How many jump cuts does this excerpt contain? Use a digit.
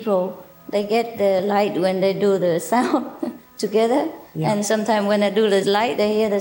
1